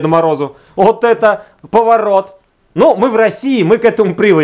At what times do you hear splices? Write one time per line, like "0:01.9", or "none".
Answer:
none